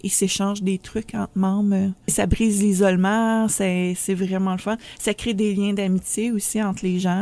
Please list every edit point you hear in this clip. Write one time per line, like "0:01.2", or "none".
0:02.1